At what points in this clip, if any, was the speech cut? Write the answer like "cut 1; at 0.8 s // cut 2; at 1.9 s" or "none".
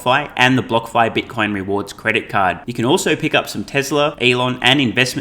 cut 1; at 4.2 s